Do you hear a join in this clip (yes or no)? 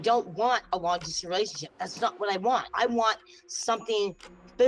yes